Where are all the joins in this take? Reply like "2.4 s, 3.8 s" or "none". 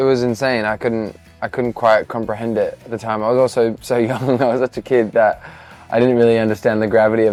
none